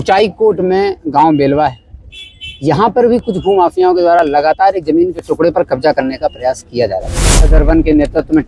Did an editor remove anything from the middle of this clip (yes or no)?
yes